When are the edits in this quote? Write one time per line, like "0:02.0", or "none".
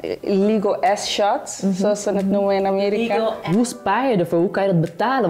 0:03.4